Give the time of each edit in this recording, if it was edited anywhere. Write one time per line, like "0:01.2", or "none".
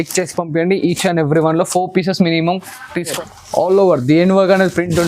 0:03.1